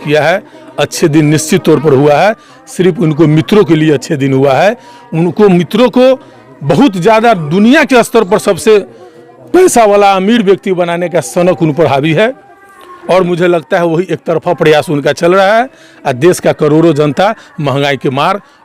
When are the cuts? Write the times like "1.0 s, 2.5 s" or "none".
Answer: none